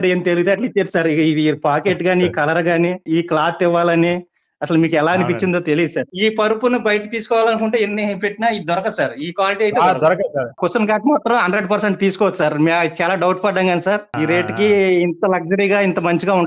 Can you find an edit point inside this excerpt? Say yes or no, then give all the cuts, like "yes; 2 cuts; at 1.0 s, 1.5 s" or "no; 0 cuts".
yes; 4 cuts; at 3.0 s, 6.1 s, 10.6 s, 14.1 s